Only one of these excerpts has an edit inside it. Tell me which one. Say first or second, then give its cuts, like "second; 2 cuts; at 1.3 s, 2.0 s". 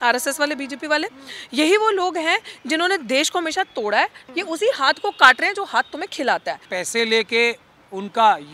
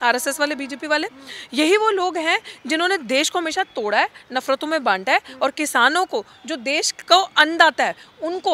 first; 2 cuts; at 4.2 s, 6.7 s